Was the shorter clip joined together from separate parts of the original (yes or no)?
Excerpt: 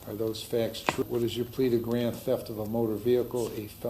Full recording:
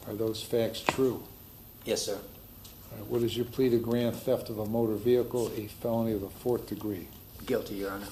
yes